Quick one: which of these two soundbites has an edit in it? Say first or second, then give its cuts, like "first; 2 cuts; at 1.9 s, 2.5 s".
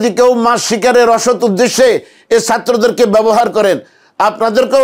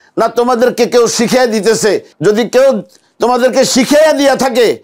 second; 1 cut; at 2.1 s